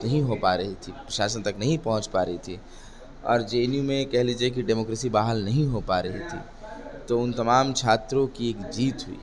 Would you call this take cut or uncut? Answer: uncut